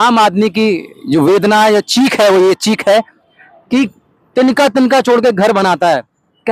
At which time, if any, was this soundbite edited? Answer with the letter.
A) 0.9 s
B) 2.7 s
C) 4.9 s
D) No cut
D